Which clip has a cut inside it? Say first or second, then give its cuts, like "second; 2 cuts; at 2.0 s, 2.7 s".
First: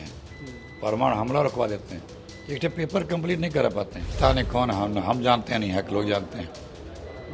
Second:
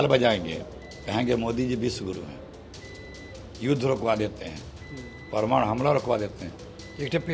first; 1 cut; at 4.0 s